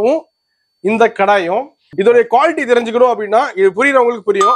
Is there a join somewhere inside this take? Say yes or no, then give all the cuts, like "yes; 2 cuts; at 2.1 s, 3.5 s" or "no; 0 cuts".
yes; 1 cut; at 1.8 s